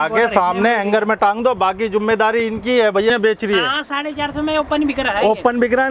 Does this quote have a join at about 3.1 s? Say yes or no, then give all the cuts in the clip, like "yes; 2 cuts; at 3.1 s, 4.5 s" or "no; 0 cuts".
yes; 1 cut; at 3.1 s